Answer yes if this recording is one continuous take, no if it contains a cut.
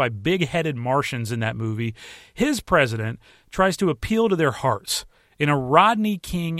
yes